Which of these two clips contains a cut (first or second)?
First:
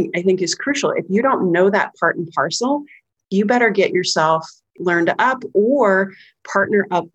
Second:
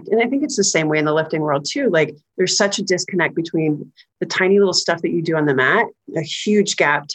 first